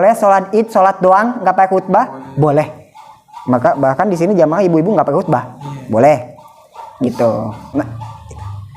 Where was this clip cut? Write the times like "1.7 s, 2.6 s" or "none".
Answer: 7.6 s